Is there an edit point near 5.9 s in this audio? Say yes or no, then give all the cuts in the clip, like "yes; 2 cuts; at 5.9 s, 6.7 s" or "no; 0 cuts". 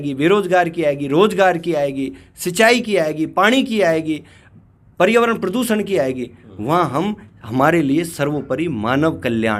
no; 0 cuts